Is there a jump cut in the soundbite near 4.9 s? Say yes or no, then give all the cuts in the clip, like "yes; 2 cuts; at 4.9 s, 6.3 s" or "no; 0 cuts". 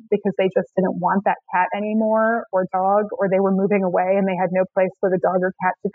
no; 0 cuts